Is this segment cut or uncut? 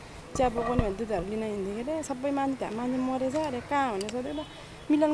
uncut